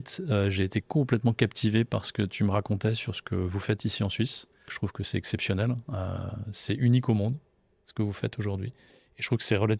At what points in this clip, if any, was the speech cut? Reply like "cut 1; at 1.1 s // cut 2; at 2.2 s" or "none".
cut 1; at 4.8 s